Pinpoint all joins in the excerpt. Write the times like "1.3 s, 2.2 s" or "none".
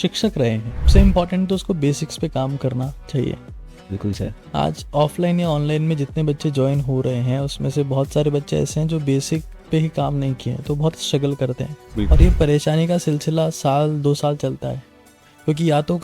0.9 s, 12.1 s